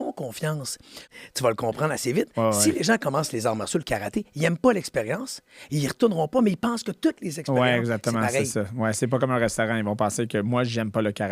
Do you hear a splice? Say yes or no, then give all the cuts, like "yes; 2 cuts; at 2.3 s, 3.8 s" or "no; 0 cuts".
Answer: yes; 1 cut; at 1.1 s